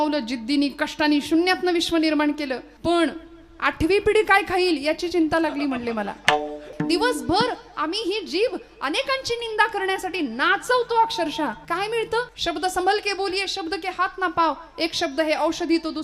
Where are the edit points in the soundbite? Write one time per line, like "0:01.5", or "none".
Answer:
0:02.7
0:06.7
0:11.6
0:12.3